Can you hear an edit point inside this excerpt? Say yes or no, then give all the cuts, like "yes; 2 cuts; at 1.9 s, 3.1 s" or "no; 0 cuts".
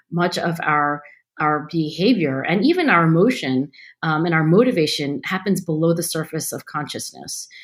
no; 0 cuts